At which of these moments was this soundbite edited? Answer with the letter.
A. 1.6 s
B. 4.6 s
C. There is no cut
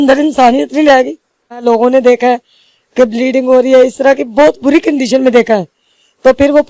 A